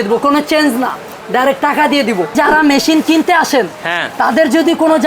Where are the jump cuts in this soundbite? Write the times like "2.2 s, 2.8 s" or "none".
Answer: 1.1 s, 2.3 s